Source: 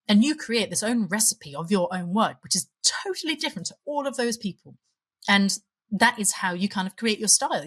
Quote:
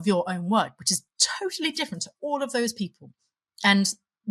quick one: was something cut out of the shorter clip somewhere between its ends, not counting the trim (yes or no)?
no